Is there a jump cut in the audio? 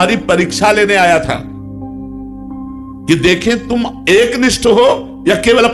no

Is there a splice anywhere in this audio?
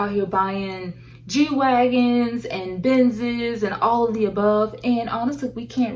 no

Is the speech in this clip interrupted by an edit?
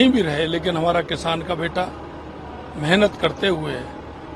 no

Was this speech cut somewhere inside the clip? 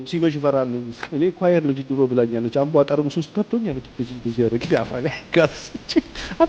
no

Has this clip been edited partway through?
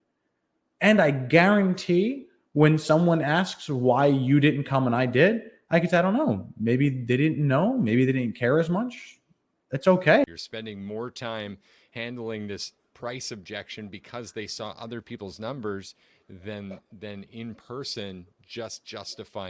yes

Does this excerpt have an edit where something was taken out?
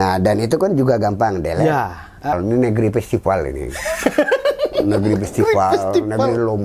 yes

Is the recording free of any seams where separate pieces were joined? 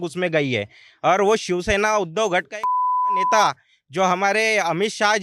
yes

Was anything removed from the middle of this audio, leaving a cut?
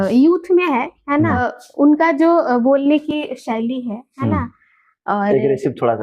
yes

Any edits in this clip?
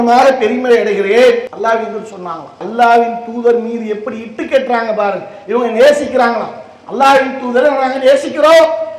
yes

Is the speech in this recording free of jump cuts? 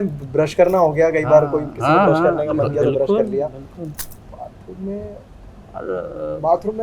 yes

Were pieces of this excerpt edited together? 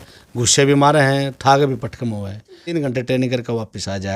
yes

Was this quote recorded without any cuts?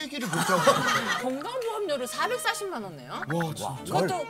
no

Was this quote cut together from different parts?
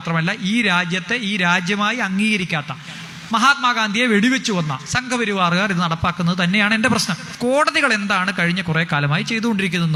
no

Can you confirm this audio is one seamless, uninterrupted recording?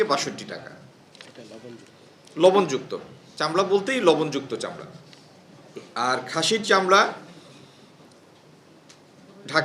yes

